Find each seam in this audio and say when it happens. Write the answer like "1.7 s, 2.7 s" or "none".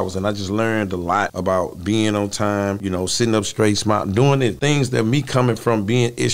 1.3 s, 2.8 s, 4.6 s